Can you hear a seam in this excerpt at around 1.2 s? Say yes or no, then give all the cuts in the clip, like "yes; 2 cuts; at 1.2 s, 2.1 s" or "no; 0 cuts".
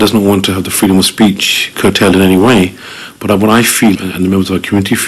no; 1 cut; at 4.0 s